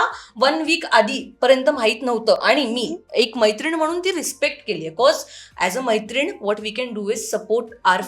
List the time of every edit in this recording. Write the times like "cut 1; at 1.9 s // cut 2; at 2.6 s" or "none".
none

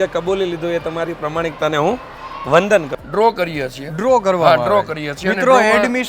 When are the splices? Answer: cut 1; at 2.9 s

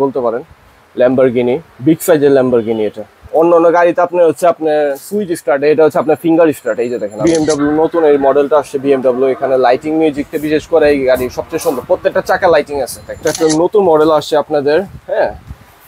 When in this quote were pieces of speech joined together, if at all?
cut 1; at 3.2 s // cut 2; at 7.2 s // cut 3; at 13.2 s

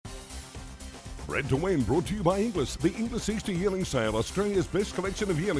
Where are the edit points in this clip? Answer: cut 1; at 1.3 s

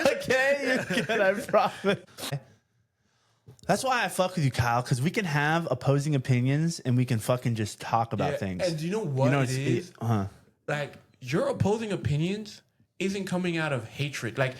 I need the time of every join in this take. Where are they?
cut 1; at 2.3 s

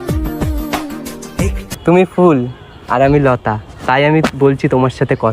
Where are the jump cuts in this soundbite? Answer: cut 1; at 1.6 s

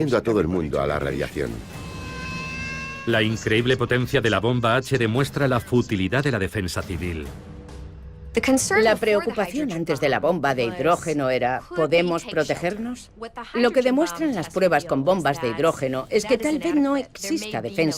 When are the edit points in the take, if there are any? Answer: cut 1; at 14.8 s

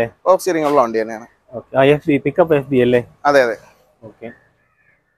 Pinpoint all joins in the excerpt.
none

